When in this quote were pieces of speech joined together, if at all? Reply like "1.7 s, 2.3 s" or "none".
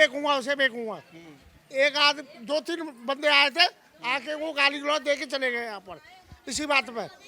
none